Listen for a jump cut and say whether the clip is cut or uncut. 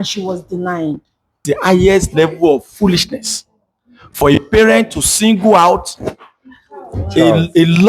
cut